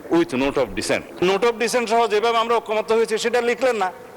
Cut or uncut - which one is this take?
cut